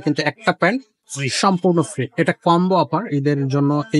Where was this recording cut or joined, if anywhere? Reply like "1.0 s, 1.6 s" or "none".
none